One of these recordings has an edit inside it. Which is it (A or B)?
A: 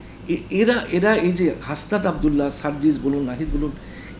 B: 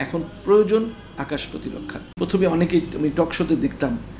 B